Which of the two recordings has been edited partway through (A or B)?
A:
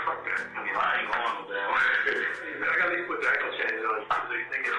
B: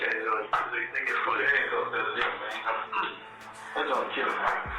A